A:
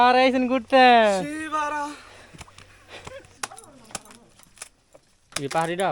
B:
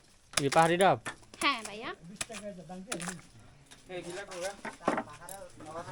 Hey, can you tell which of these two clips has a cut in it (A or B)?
A